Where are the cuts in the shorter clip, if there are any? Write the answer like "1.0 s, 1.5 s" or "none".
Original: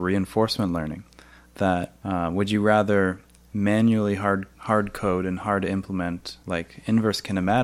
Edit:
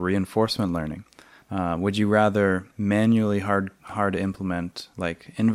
1.4 s, 2.7 s, 3.9 s